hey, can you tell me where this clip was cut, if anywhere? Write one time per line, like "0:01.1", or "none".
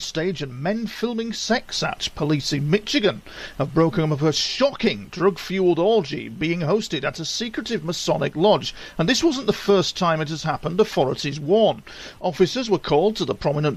0:05.1